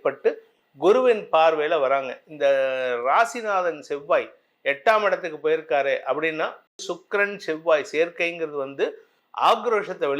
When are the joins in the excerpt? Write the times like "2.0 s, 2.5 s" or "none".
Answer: 6.8 s